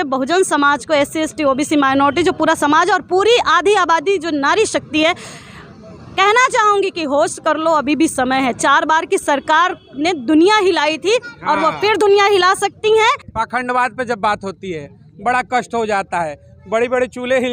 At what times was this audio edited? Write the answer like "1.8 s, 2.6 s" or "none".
13.3 s